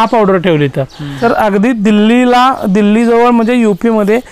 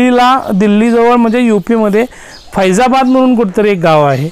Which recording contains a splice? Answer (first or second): first